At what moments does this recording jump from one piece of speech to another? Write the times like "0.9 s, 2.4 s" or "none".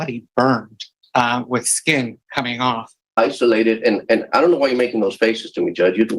3.1 s